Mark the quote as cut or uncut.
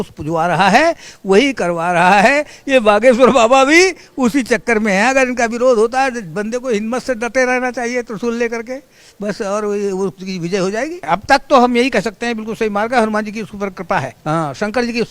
cut